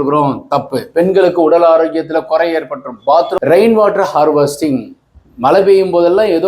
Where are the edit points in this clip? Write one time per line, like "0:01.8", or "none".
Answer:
0:03.4